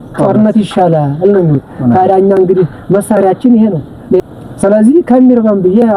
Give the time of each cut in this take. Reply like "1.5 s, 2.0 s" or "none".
4.2 s